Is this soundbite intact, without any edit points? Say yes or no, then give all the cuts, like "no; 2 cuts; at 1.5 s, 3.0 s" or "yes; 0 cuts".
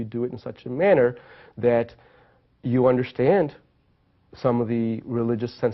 no; 1 cut; at 1.4 s